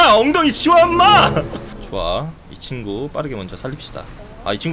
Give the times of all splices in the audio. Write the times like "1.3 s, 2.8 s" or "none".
1.9 s